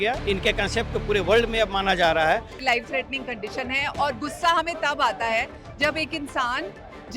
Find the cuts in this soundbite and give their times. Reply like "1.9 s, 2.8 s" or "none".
2.5 s